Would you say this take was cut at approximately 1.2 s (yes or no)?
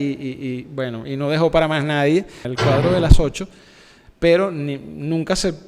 no